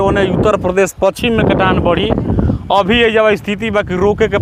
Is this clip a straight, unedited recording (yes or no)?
yes